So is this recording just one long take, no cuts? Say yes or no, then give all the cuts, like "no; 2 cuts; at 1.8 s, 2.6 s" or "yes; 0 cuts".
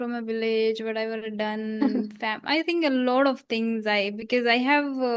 yes; 0 cuts